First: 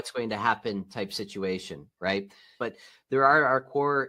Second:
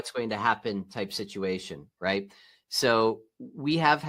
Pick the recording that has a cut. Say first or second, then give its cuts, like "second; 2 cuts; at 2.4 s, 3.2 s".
first; 1 cut; at 2.5 s